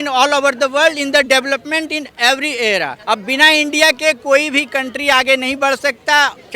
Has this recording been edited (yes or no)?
yes